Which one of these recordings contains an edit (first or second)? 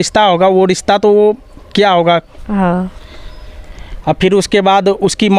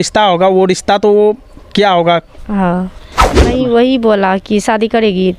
second